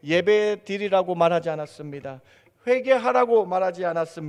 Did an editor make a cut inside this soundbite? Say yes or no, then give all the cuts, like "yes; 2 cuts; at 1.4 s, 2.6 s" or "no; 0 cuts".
no; 0 cuts